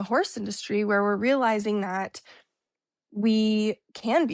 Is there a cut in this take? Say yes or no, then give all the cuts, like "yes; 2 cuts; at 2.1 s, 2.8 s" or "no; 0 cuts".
no; 0 cuts